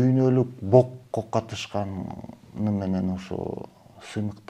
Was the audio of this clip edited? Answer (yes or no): no